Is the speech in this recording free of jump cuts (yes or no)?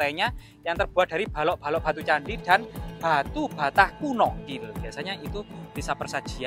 no